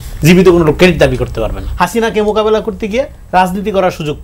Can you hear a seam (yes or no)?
yes